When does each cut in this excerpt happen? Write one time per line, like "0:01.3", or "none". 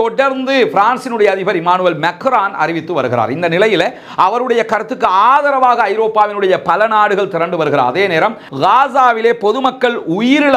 0:08.4